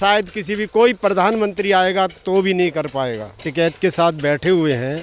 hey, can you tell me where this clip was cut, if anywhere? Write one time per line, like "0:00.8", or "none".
0:03.4

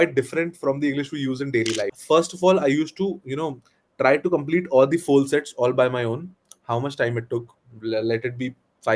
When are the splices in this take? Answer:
0:02.0

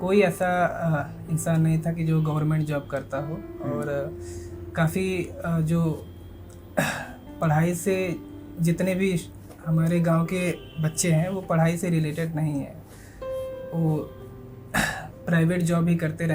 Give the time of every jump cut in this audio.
none

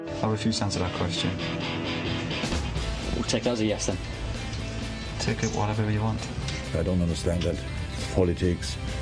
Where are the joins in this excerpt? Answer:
none

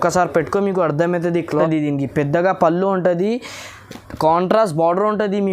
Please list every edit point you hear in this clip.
0:01.5

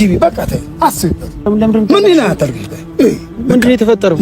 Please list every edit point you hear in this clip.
0:01.4

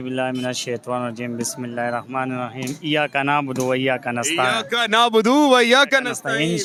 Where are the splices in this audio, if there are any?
none

